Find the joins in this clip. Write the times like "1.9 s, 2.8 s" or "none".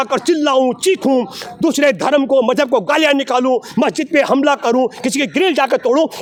none